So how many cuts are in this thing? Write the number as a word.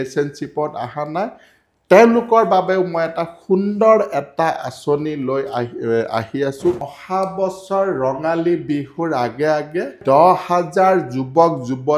two